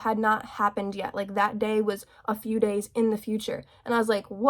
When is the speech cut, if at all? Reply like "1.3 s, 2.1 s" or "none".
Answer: none